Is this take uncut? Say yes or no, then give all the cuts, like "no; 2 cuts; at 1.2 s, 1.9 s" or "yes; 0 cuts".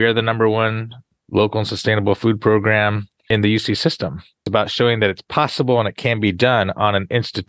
no; 3 cuts; at 1.1 s, 3.3 s, 4.4 s